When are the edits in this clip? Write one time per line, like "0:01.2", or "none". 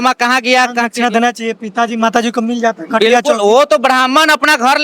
none

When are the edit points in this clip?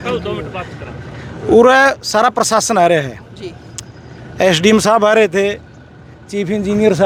none

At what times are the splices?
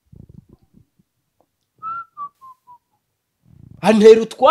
none

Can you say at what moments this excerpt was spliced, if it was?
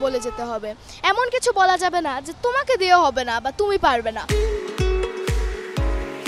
0:04.2

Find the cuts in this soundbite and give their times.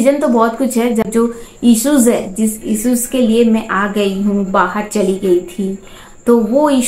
0:01.0

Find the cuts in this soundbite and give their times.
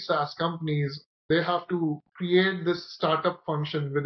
0:01.6

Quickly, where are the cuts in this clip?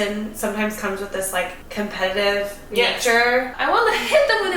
0:01.6
0:03.5

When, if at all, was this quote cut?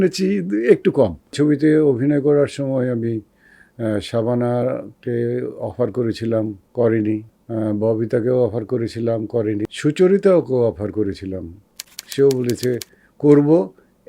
0:01.3
0:06.6
0:07.4
0:09.6

